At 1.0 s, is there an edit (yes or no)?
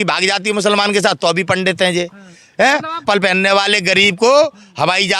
no